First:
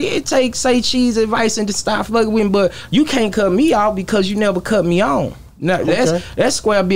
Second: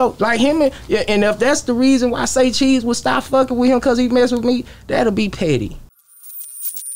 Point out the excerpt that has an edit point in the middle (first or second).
second